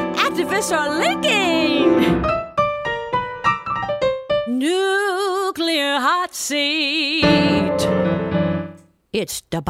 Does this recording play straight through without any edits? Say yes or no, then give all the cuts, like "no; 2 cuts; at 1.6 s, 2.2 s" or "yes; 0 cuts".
yes; 0 cuts